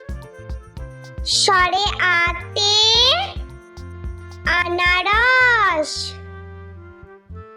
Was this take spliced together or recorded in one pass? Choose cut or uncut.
cut